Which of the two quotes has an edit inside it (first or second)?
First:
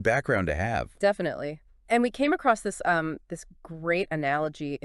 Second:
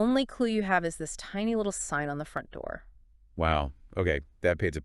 second